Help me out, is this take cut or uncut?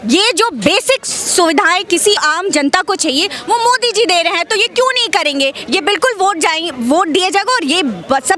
cut